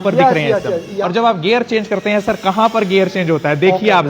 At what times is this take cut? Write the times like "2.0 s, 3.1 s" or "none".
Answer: 1.0 s